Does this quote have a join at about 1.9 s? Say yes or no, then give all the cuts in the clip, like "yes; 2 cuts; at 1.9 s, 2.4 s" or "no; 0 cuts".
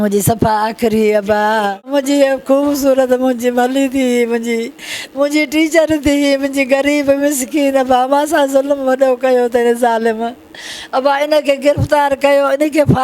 yes; 1 cut; at 1.9 s